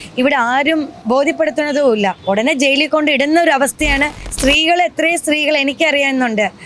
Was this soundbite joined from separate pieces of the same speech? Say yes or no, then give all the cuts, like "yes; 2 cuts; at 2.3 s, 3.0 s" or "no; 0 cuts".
yes; 3 cuts; at 1.0 s, 2.2 s, 4.2 s